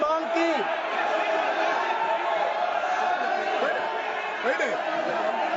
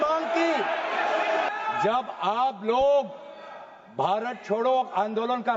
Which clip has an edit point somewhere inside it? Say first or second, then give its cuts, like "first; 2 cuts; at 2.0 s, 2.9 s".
second; 1 cut; at 1.5 s